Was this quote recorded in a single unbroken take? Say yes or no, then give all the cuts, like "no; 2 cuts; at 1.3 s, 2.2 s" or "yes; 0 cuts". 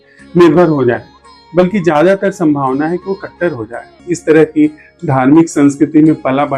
no; 1 cut; at 4.0 s